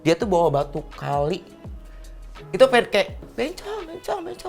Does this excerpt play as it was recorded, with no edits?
no; 1 cut; at 3.2 s

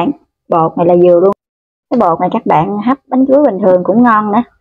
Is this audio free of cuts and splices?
no; 1 cut; at 1.4 s

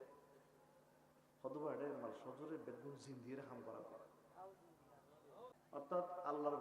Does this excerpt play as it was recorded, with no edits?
no; 1 cut; at 5.6 s

